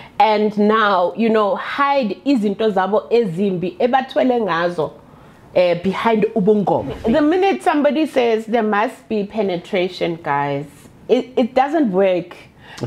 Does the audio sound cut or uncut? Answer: cut